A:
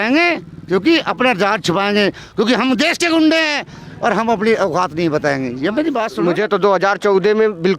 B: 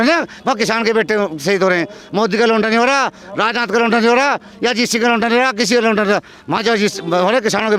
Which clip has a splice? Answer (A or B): A